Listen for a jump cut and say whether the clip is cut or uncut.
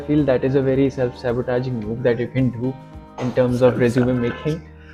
uncut